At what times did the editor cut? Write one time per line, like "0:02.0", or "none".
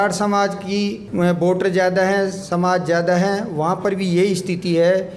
0:01.0